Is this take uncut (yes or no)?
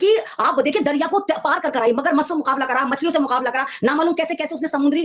yes